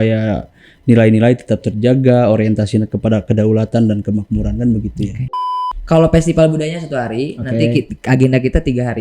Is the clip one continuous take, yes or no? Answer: no